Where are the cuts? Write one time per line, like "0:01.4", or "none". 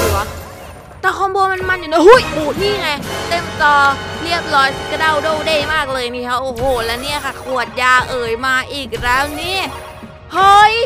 none